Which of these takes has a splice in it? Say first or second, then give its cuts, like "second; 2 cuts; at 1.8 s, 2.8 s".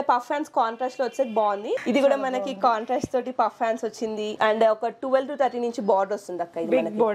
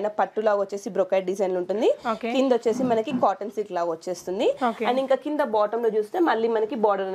first; 2 cuts; at 1.8 s, 4.3 s